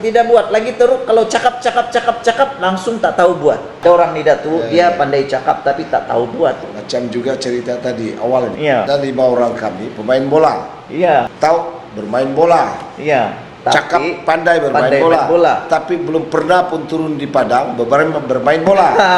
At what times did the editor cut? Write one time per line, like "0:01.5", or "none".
0:03.7
0:06.7
0:08.7
0:11.3